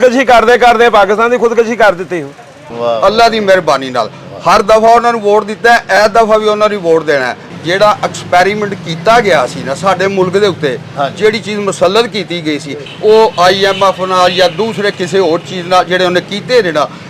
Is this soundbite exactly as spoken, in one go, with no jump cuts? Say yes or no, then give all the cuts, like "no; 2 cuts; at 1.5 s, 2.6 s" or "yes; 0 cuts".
no; 3 cuts; at 2.7 s, 7.6 s, 12.8 s